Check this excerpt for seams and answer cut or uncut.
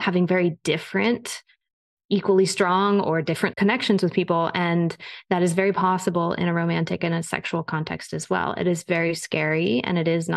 cut